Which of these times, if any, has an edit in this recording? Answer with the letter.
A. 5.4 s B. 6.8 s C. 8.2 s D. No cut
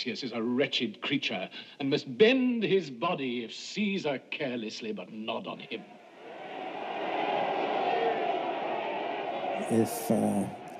C